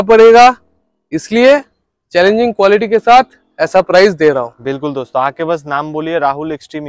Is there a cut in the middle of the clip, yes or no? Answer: no